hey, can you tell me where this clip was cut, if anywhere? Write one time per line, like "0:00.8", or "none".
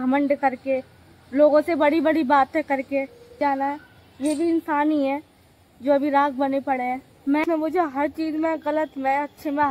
0:03.4
0:07.4